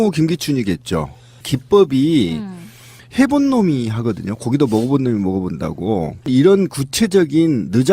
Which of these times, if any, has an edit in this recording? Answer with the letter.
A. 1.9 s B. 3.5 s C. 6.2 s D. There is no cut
A